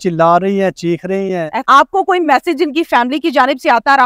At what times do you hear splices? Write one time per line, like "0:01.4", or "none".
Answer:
0:01.5

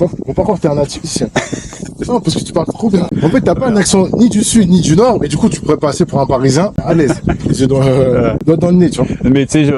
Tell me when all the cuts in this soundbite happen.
0:03.1
0:06.8
0:08.4

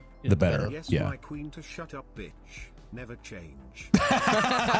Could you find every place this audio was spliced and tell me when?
none

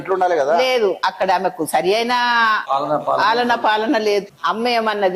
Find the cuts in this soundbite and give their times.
0:01.0
0:02.6
0:04.2

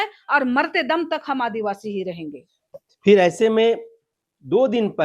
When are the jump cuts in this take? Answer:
none

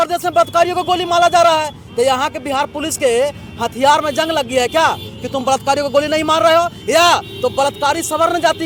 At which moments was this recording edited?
none

